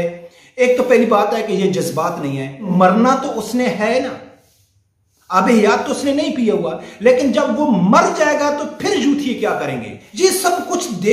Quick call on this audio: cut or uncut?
cut